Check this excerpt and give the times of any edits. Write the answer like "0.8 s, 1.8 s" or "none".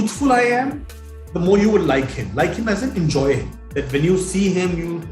3.6 s